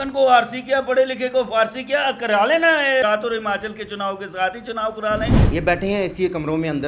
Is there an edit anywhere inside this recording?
yes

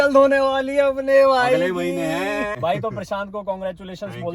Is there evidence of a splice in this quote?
yes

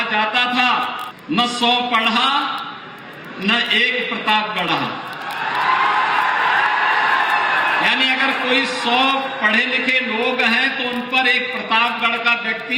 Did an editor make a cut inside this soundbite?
yes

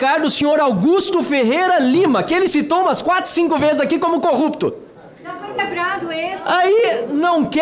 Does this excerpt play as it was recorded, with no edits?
yes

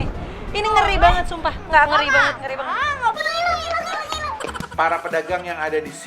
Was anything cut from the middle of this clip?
yes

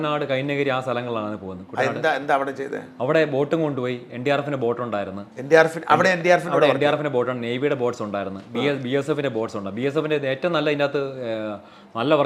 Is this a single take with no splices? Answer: yes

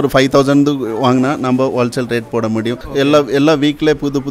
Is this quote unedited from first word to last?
no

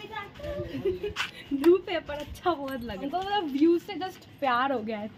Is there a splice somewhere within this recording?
yes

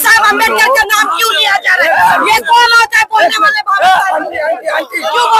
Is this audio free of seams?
yes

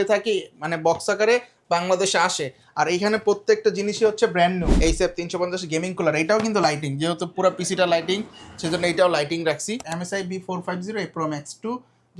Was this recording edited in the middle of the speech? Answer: yes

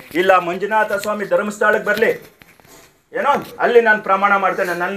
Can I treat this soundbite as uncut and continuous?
yes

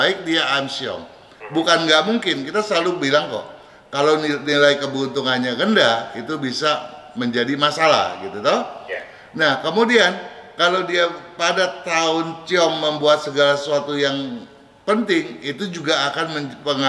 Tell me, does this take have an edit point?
no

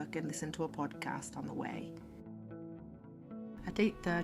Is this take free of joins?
no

